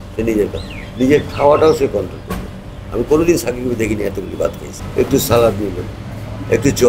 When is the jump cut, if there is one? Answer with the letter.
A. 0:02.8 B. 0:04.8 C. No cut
B